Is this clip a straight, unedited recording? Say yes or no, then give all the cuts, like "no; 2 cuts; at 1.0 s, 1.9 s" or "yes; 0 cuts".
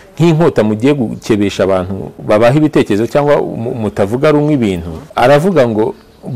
no; 2 cuts; at 2.1 s, 4.9 s